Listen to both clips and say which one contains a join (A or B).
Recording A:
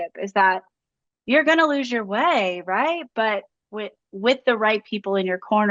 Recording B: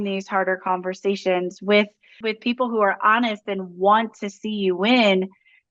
B